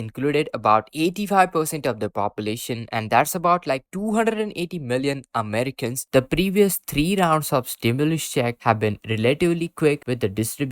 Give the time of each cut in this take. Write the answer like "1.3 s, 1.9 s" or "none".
6.0 s